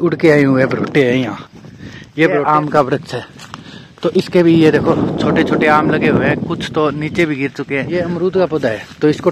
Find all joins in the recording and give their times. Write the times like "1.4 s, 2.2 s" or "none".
2.5 s, 7.9 s

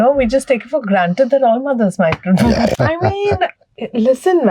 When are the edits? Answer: 2.7 s

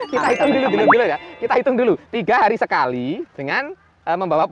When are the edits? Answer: none

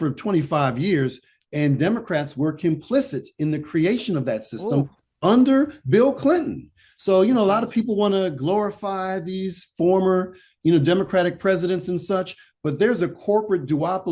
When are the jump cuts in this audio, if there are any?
none

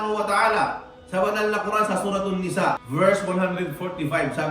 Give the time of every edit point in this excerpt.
0.9 s, 2.8 s

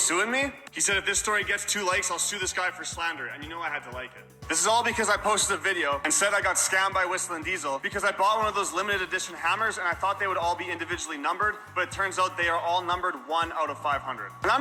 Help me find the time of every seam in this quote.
none

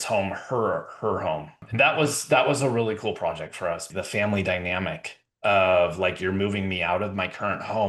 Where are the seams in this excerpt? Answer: 1.6 s, 3.9 s

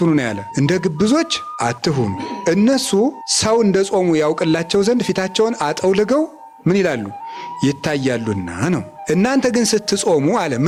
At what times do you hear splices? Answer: none

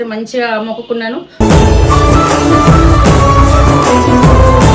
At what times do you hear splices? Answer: none

